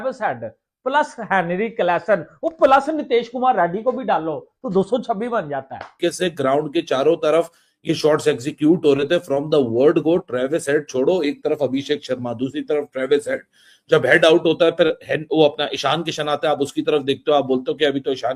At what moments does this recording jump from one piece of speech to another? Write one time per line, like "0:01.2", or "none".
0:06.0